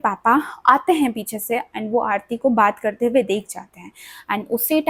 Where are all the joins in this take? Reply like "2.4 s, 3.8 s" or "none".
none